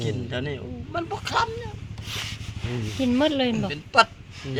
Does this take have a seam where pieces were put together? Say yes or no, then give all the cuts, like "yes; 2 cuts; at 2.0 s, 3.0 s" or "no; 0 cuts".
no; 0 cuts